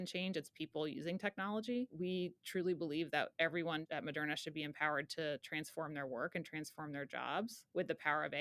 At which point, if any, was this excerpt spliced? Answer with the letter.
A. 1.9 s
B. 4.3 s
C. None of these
A